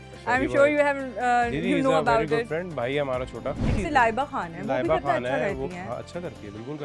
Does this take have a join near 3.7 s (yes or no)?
yes